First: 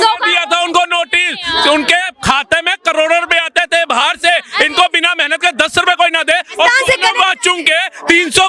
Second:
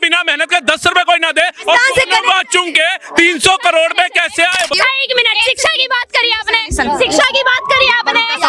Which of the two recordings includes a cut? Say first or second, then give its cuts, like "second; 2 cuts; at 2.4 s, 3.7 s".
second; 1 cut; at 4.7 s